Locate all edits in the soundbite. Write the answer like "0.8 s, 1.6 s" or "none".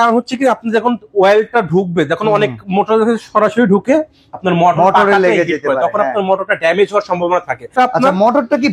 7.7 s